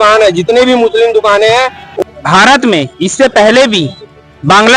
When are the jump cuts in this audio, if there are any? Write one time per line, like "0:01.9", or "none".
0:01.9